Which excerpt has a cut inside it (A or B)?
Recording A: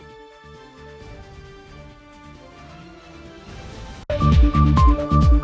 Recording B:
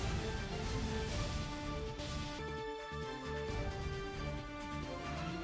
A